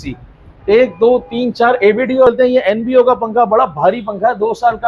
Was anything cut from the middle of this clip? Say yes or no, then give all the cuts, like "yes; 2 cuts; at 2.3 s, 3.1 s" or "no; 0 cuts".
yes; 1 cut; at 2.3 s